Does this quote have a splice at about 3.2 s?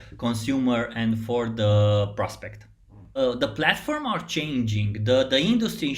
yes; 1 cut; at 3.2 s

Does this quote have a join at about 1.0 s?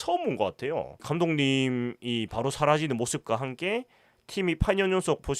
yes; 1 cut; at 1.0 s

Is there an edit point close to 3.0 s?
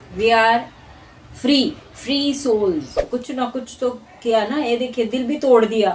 yes; 1 cut; at 3.0 s

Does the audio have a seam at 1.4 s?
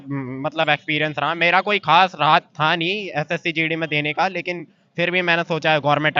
no; 0 cuts

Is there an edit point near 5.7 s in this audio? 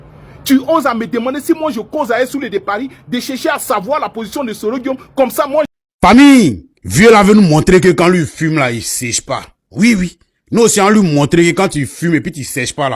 yes; 1 cut; at 5.7 s

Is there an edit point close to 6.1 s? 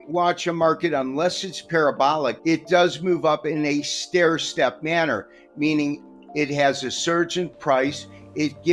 no; 1 cut; at 2.4 s

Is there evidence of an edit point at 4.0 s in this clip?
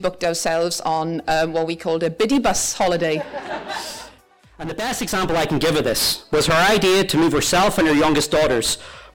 yes; 1 cut; at 4.0 s

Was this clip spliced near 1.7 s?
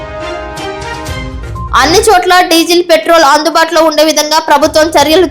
yes; 1 cut; at 1.7 s

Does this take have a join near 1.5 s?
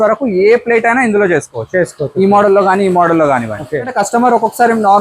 no; 1 cut; at 4.0 s

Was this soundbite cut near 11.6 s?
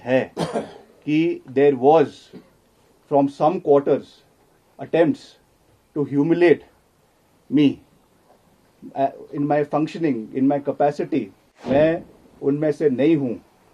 yes; 1 cut; at 11.6 s

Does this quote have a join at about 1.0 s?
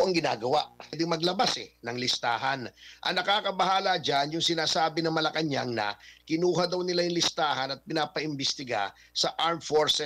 yes; 1 cut; at 1.0 s

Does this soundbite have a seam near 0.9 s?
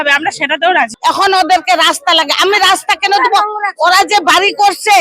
yes; 1 cut; at 0.9 s

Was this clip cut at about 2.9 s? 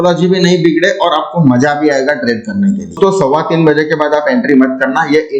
yes; 1 cut; at 2.9 s

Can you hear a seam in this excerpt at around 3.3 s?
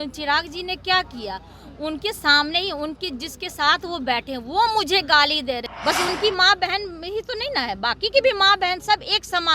no; 1 cut; at 5.7 s

